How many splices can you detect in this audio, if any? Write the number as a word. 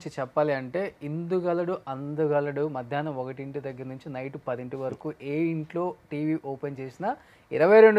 zero